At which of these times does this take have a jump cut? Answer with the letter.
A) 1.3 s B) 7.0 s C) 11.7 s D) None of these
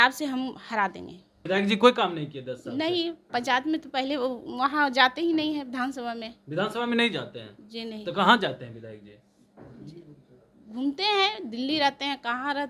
A